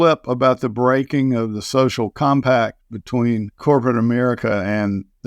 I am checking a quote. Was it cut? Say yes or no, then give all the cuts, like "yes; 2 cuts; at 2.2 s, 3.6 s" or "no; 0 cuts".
yes; 1 cut; at 3.5 s